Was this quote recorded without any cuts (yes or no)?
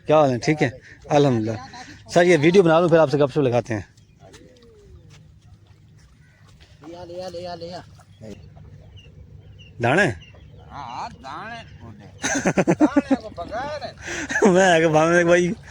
no